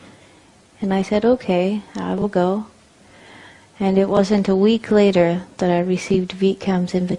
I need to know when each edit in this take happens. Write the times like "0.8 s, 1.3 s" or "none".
5.4 s